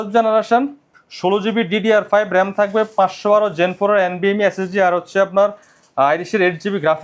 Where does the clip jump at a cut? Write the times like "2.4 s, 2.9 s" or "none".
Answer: none